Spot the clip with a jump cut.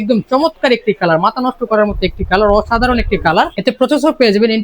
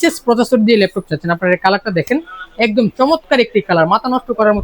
first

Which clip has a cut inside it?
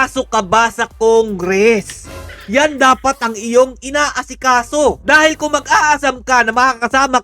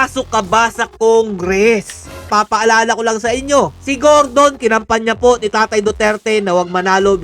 second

